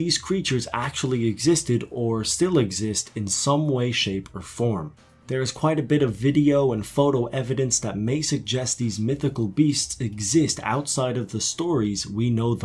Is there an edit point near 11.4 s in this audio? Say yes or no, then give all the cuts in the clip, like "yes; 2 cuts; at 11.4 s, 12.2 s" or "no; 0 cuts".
yes; 1 cut; at 11.4 s